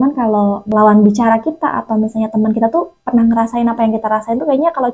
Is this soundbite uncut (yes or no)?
yes